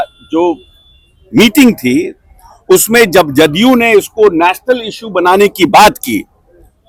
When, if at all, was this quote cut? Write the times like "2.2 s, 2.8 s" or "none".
none